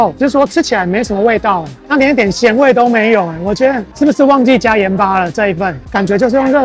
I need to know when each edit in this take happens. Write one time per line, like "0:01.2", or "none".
none